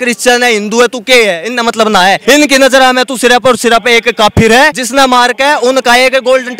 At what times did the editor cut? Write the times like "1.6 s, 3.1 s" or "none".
2.2 s, 4.8 s

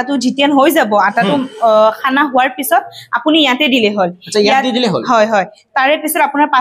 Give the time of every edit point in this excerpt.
none

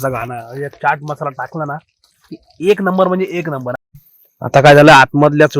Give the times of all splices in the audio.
3.8 s

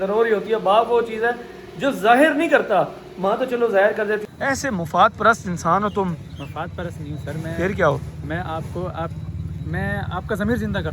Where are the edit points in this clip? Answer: 4.2 s

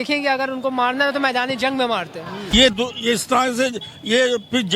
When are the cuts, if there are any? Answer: 2.5 s

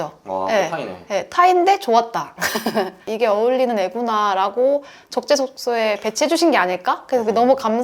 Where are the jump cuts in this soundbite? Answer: 3.0 s

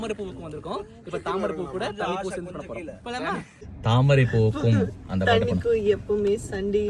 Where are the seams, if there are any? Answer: 3.6 s

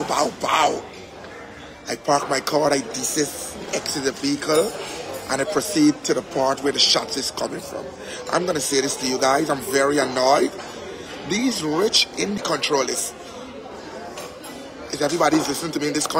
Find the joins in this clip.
12.4 s

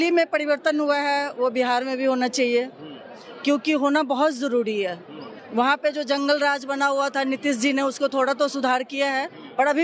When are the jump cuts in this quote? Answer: none

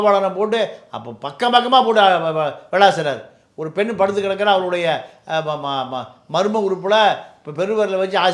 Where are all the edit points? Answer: none

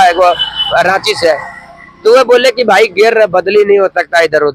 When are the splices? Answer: none

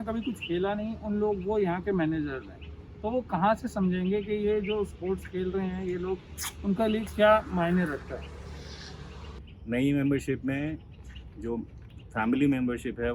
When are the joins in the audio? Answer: 9.4 s

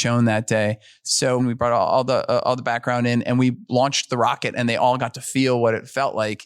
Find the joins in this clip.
1.4 s

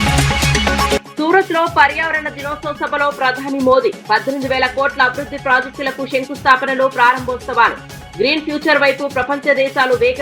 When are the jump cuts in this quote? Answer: 1.0 s

